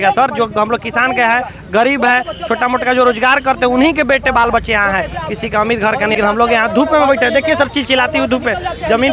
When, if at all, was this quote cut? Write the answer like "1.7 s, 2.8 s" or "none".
6.2 s